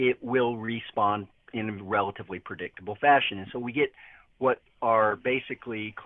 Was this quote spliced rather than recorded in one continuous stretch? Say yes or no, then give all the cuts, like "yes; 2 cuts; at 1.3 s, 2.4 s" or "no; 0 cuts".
no; 0 cuts